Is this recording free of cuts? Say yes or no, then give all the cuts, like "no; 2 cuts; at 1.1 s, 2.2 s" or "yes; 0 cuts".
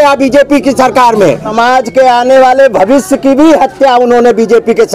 no; 1 cut; at 1.5 s